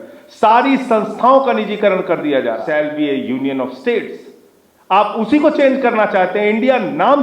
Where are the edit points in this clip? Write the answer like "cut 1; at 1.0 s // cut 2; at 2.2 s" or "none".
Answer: cut 1; at 2.6 s